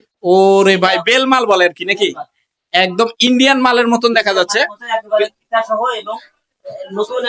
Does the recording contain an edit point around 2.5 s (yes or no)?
no